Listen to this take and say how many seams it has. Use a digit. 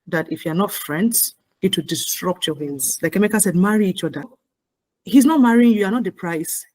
2